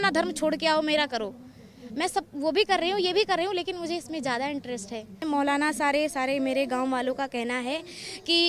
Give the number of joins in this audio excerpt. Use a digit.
1